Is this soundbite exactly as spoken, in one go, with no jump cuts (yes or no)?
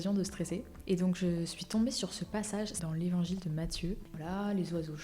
no